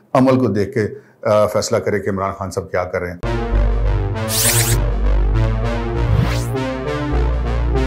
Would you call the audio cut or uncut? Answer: cut